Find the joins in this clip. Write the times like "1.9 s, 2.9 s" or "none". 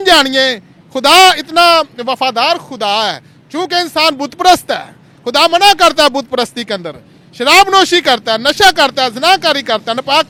none

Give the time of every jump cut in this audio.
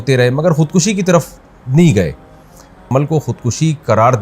2.8 s

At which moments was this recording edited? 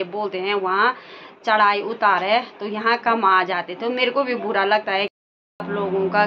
5.1 s

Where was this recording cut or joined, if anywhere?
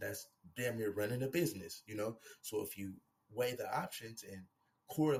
none

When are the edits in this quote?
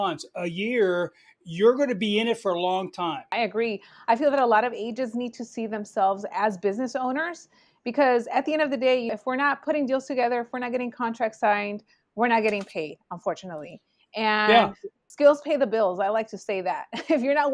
3.3 s, 9.1 s, 15.0 s

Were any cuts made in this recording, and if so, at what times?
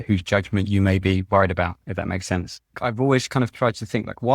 2.7 s

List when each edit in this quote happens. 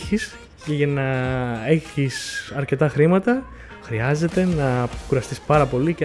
none

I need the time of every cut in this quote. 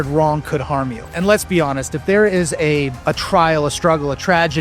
1.1 s, 2.9 s

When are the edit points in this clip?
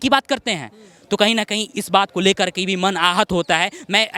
none

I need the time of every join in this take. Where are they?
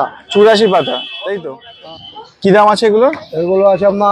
1.5 s

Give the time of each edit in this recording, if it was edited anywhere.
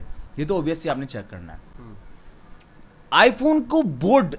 none

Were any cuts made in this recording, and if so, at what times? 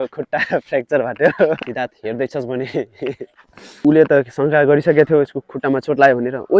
1.6 s, 3.7 s

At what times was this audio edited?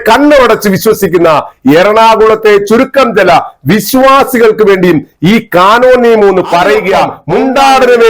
7.1 s

